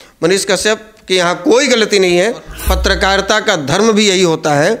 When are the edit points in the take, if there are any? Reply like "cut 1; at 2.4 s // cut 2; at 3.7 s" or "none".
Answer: cut 1; at 2.5 s